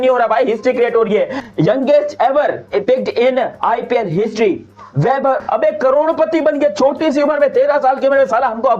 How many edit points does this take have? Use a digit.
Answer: 2